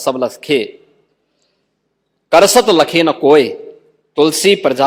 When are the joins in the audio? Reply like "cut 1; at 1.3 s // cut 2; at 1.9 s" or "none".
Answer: none